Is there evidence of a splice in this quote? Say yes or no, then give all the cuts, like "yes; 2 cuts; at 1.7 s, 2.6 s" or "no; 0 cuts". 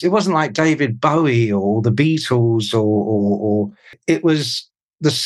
yes; 1 cut; at 4.0 s